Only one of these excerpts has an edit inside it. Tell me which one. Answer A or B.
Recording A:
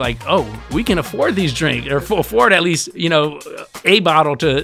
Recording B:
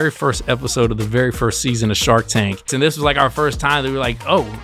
B